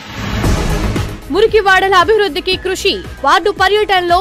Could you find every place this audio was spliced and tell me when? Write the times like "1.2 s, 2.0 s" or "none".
0.9 s